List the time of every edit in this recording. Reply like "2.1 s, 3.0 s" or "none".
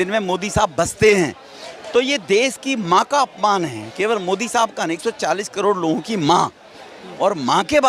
none